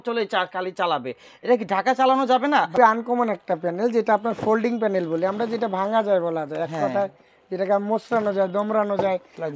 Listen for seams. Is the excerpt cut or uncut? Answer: cut